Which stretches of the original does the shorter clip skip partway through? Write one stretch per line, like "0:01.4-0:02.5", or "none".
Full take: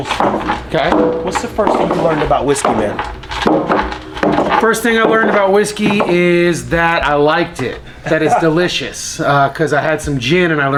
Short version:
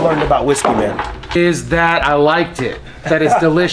0:03.4-0:06.4